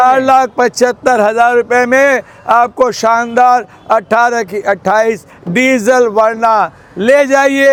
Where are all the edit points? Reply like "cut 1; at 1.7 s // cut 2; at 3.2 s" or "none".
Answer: none